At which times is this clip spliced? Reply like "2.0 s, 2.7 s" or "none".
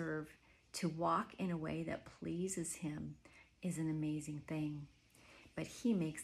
none